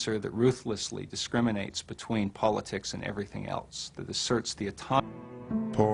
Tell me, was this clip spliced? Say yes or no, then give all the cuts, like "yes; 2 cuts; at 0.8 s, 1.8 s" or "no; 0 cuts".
no; 0 cuts